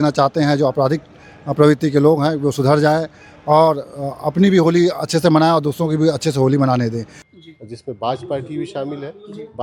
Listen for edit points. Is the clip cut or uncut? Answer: cut